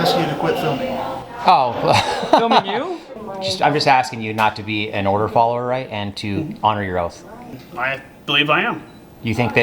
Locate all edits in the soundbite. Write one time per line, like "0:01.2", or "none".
0:03.0
0:07.5